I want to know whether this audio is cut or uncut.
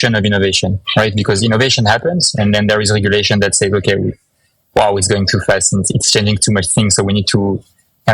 uncut